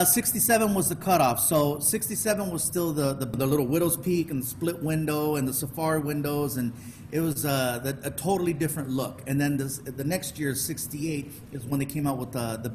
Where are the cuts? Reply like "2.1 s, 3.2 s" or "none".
3.3 s